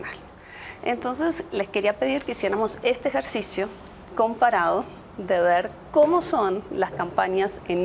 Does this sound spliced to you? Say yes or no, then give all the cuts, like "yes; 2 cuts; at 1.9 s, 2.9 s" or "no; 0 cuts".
no; 0 cuts